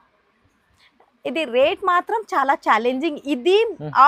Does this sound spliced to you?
no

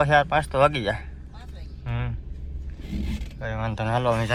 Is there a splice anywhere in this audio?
no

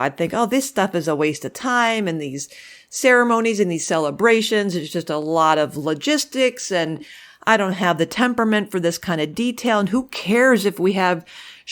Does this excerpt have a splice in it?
no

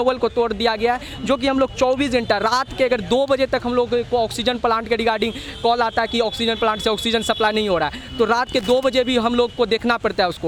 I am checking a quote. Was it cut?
no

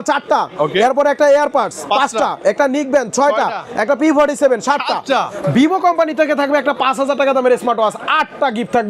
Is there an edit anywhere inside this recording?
no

